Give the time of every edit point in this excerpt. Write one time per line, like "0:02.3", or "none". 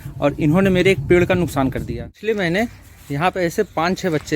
0:02.1